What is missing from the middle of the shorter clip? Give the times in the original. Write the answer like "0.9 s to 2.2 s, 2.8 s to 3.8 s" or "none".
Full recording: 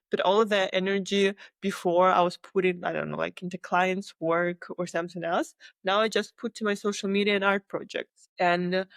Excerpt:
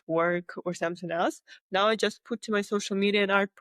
none